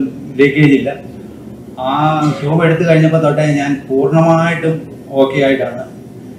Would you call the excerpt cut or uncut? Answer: uncut